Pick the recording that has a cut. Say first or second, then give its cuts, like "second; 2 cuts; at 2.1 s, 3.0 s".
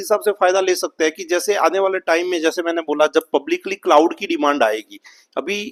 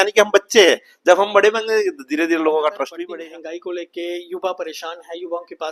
second; 1 cut; at 3.0 s